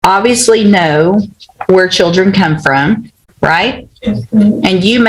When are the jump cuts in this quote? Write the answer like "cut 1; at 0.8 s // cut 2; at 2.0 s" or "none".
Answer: none

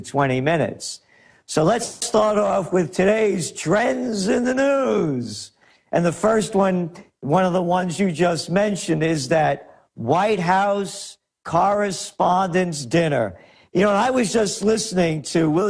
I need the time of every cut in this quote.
cut 1; at 6.5 s

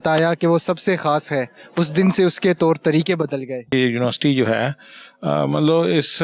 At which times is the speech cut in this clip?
cut 1; at 3.7 s

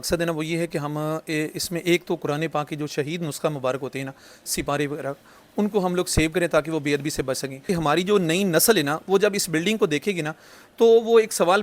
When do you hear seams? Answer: cut 1; at 7.7 s

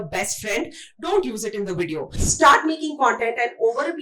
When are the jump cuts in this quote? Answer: cut 1; at 2.2 s

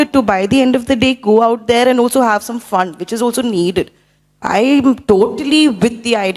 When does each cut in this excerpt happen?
none

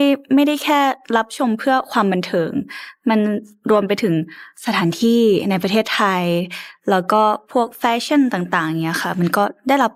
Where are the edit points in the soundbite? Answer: none

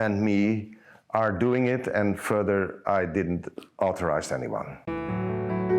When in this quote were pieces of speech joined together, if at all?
cut 1; at 4.8 s

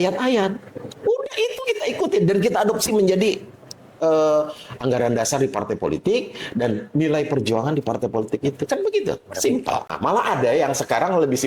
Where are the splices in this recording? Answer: cut 1; at 9.9 s

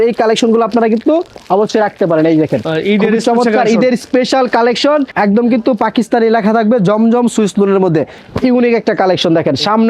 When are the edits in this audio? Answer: cut 1; at 5.1 s // cut 2; at 8.2 s

